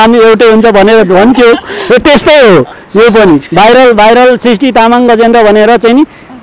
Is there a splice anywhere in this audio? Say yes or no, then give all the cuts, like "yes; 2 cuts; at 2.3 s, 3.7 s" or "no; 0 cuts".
no; 0 cuts